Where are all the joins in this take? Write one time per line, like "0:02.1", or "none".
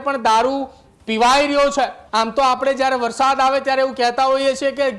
0:02.0